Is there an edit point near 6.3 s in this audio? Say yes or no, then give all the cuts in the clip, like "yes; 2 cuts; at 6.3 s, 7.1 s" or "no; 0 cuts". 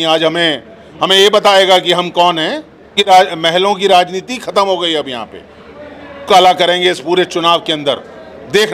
yes; 2 cuts; at 3.0 s, 6.3 s